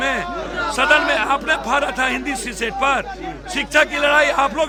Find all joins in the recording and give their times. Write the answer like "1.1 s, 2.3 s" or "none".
none

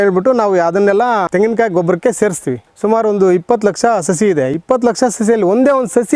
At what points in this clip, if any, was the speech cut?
1.3 s, 2.6 s

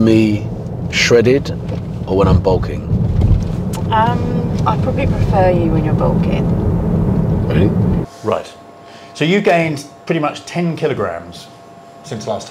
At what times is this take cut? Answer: 8.0 s

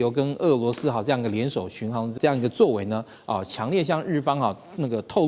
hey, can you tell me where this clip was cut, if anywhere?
2.2 s

